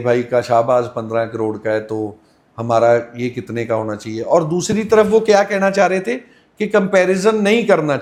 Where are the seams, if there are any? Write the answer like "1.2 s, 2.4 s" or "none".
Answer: none